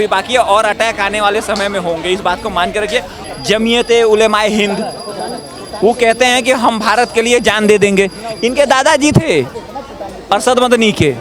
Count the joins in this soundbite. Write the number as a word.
one